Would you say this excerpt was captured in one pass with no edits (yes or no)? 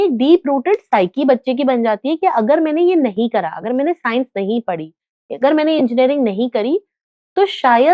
yes